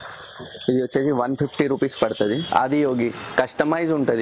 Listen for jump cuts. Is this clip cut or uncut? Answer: cut